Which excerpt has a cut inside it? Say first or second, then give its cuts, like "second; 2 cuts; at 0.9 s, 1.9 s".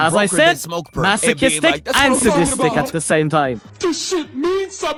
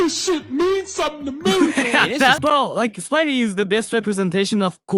second; 1 cut; at 2.4 s